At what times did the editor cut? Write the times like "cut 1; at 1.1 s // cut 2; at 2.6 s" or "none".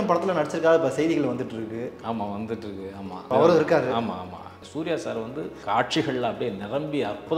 cut 1; at 3.3 s // cut 2; at 4.6 s // cut 3; at 5.6 s